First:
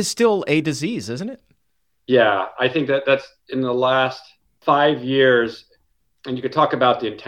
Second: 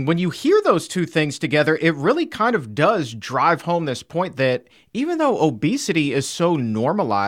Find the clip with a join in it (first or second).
first